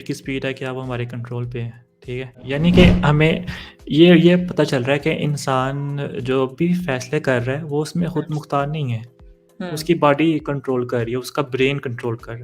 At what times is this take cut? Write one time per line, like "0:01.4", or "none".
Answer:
0:02.5